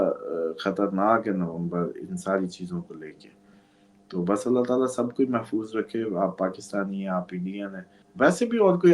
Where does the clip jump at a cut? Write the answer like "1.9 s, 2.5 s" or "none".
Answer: 8.0 s